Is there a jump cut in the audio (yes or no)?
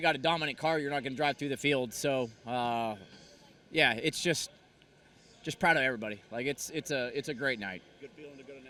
no